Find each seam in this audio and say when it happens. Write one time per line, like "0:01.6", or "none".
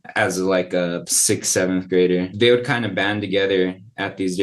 0:01.1
0:02.3